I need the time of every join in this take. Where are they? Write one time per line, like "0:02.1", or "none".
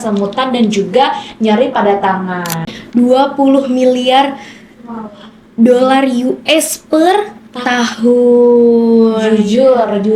0:02.7